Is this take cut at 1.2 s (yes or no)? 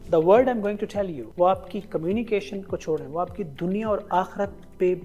yes